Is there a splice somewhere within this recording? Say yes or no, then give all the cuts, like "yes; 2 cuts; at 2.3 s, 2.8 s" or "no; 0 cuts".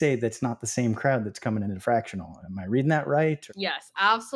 no; 0 cuts